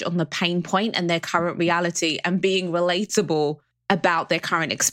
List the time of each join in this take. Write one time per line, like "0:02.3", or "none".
0:03.7